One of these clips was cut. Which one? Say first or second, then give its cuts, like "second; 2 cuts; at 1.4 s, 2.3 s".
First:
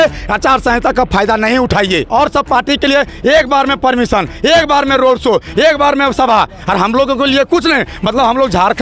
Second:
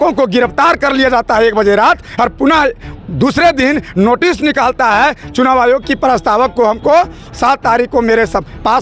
first; 1 cut; at 2.1 s